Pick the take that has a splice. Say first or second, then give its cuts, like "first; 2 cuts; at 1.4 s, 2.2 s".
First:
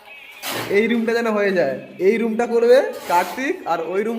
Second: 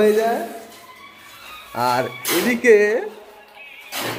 first; 1 cut; at 1.9 s